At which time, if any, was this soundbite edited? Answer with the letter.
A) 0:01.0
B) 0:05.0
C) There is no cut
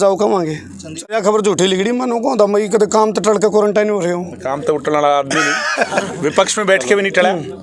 A